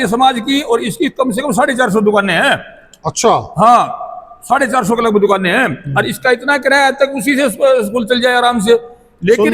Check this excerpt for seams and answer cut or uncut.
uncut